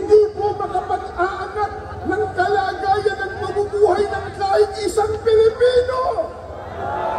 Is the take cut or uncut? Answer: uncut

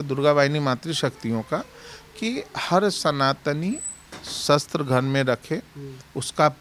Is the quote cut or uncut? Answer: uncut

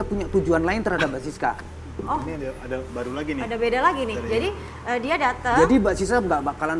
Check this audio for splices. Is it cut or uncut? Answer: uncut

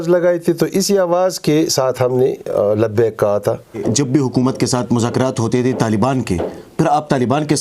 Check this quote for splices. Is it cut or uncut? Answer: cut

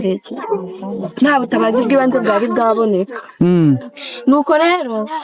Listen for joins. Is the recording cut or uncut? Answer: uncut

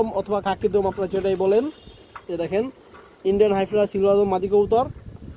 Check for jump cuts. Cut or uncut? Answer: uncut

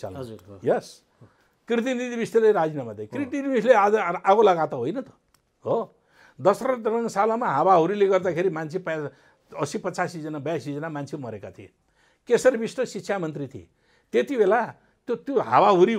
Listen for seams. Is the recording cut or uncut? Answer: uncut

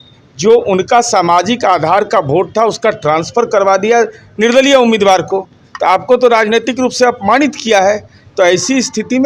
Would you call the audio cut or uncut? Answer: uncut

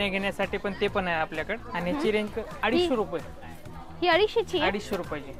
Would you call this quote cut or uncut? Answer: cut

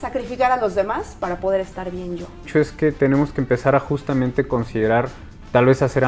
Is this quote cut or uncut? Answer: cut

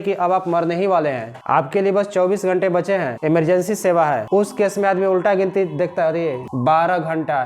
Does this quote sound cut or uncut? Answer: cut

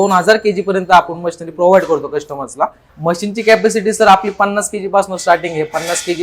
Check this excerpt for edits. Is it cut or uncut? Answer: cut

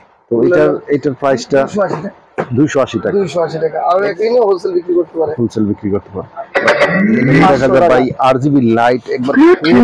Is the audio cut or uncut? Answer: cut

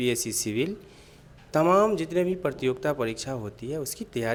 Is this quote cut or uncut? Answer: uncut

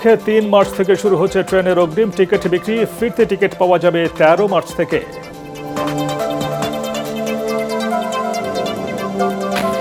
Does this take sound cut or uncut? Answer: uncut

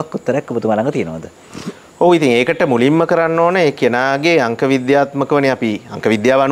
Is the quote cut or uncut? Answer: uncut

